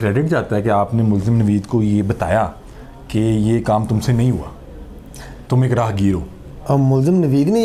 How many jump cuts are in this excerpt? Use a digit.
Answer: 0